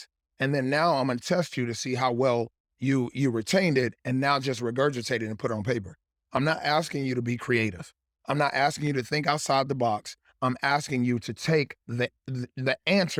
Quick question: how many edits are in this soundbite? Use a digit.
0